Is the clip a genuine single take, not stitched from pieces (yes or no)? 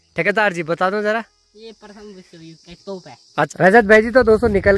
no